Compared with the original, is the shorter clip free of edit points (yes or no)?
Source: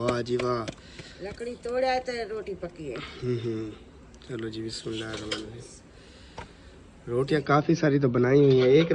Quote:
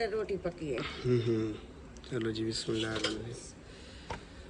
no